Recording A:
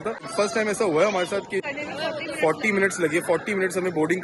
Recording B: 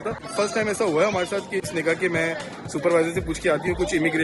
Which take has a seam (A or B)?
B